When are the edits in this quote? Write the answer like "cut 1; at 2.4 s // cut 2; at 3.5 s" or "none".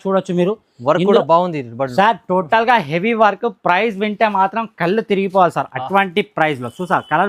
none

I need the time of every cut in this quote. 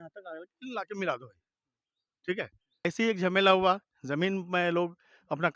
cut 1; at 2.8 s

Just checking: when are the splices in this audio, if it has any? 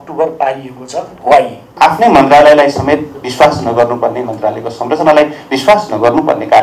cut 1; at 1.7 s

